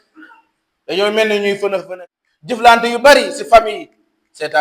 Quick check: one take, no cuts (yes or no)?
no